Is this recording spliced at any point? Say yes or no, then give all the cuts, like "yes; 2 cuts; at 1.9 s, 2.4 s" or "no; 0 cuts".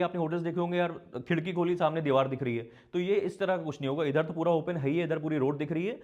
no; 0 cuts